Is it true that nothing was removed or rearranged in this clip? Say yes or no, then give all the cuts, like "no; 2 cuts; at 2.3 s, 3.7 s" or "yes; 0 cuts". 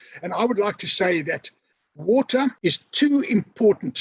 no; 1 cut; at 2.6 s